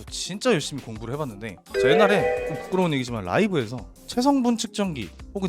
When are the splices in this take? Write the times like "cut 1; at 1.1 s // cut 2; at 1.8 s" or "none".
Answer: cut 1; at 1.5 s